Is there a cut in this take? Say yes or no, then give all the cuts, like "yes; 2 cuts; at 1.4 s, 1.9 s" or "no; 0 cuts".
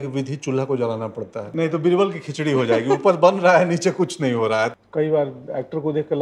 yes; 2 cuts; at 1.4 s, 4.7 s